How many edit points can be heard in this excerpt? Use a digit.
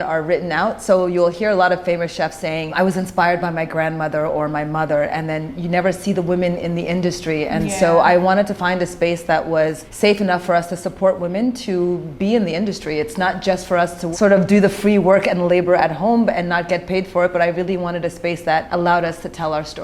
4